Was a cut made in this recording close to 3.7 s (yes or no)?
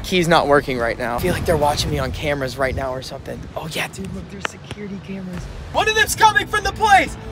no